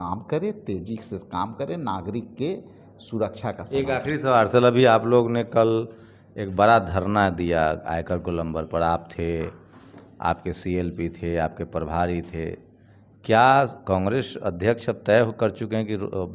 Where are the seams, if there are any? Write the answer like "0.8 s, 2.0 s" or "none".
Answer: none

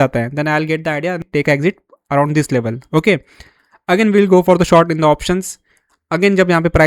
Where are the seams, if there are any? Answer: 1.3 s

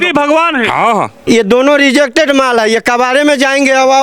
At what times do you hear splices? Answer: 1.2 s

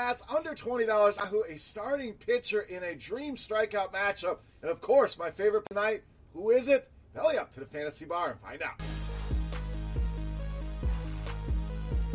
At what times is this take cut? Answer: 1.2 s, 5.7 s

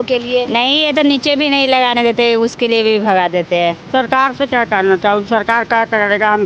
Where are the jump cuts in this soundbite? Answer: 3.8 s

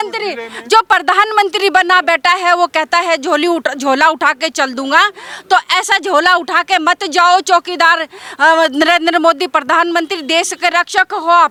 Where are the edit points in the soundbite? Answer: none

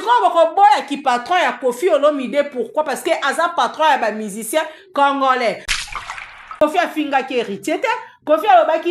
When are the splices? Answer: 5.8 s

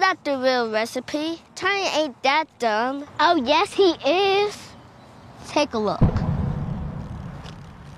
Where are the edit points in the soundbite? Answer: 3.1 s

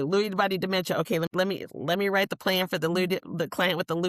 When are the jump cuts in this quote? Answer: 1.3 s

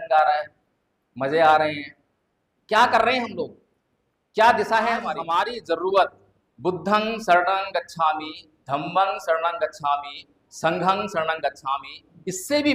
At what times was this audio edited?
5.2 s

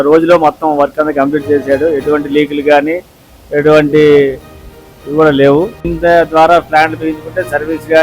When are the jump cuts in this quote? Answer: 5.9 s

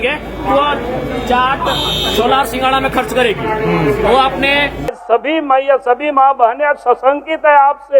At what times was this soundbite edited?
5.0 s

